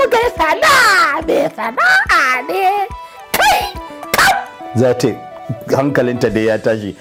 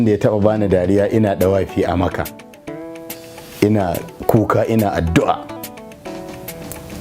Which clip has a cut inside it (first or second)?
second